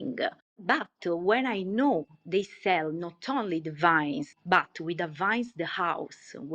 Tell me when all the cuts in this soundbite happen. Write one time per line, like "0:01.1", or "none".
none